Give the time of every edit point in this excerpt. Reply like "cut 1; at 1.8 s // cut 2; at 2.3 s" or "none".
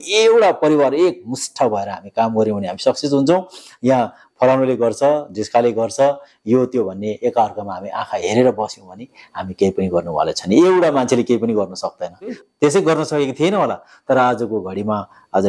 cut 1; at 12.4 s